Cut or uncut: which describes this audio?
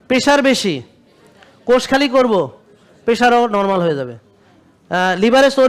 uncut